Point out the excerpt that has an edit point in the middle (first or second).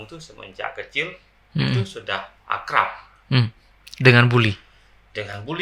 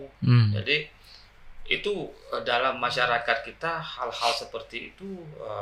first